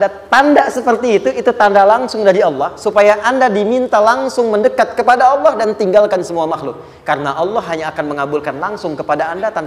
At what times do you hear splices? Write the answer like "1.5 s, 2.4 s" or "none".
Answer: none